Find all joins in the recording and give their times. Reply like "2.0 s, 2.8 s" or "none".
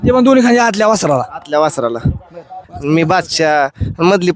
2.7 s